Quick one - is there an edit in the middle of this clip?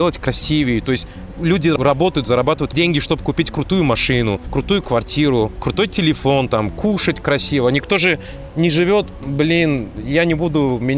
yes; 4 cuts; at 1.7 s, 2.7 s, 4.4 s, 5.6 s

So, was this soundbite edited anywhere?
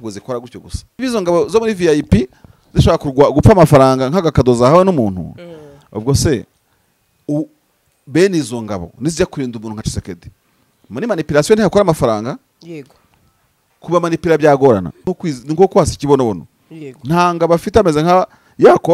yes; 2 cuts; at 1.0 s, 15.1 s

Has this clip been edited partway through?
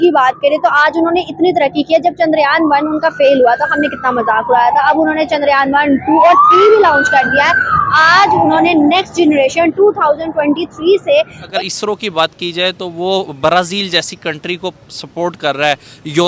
yes; 1 cut; at 11.5 s

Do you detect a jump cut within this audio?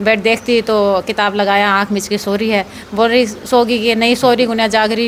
no; 0 cuts

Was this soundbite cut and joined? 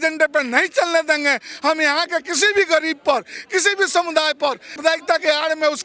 yes; 1 cut; at 4.8 s

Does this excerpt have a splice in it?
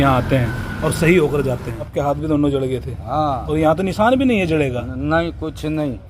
yes; 1 cut; at 1.9 s

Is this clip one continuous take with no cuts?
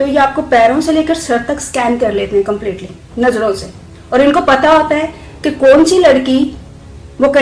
yes; 0 cuts

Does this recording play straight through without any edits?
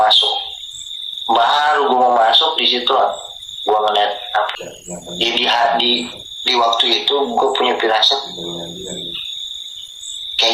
no; 1 cut; at 4.5 s

